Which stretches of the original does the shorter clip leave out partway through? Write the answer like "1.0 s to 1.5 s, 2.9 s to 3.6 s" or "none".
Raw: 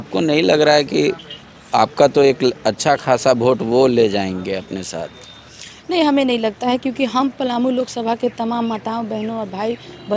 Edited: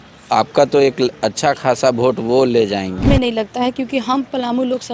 4.5 s to 6.1 s